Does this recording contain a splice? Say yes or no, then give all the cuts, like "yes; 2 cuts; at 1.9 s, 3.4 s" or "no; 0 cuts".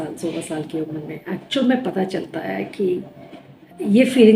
no; 0 cuts